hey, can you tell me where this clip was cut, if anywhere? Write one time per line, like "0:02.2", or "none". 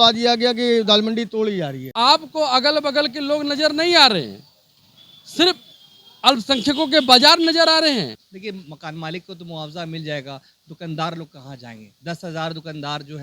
0:01.8
0:08.0